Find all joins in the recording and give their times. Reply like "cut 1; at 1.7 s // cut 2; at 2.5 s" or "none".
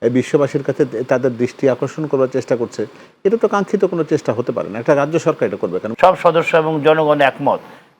cut 1; at 5.8 s